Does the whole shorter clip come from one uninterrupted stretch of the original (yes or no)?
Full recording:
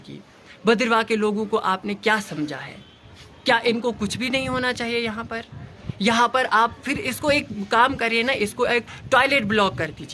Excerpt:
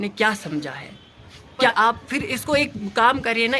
no